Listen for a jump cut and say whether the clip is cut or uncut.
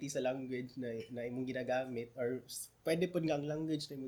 uncut